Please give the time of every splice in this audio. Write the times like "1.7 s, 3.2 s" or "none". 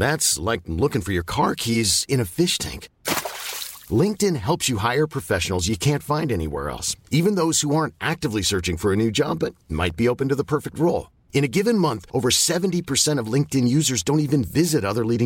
none